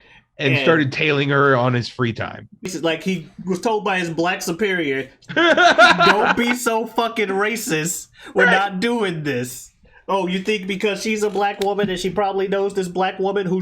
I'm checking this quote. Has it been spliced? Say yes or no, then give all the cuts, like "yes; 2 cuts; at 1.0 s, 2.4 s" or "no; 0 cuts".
yes; 1 cut; at 2.7 s